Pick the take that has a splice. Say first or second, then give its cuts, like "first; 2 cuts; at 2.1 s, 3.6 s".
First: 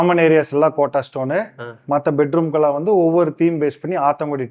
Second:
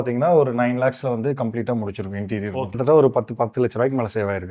second; 1 cut; at 2.7 s